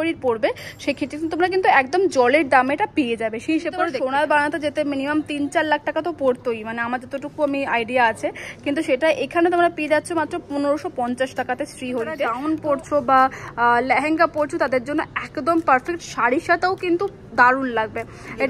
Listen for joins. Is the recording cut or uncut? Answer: cut